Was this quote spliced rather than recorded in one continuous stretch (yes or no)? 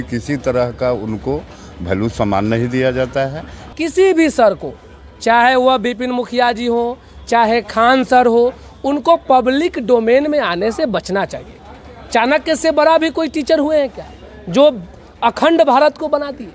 yes